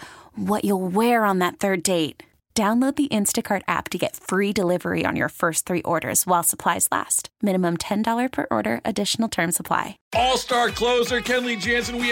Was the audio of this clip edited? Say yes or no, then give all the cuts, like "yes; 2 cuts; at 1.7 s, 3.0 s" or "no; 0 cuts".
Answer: yes; 1 cut; at 10.0 s